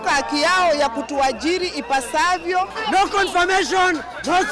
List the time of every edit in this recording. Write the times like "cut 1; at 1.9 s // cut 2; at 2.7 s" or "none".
cut 1; at 2.7 s